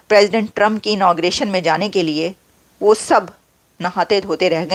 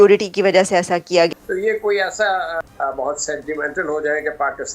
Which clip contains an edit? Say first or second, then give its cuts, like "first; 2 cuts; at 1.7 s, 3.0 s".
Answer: second; 2 cuts; at 1.3 s, 2.6 s